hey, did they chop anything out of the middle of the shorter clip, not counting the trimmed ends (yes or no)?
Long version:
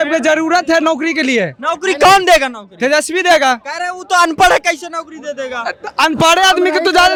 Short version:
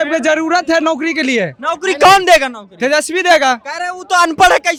no